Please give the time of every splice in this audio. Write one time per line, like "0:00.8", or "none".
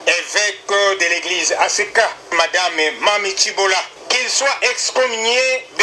0:04.0